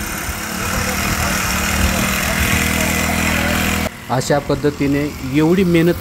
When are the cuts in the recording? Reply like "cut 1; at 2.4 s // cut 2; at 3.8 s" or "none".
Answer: cut 1; at 3.9 s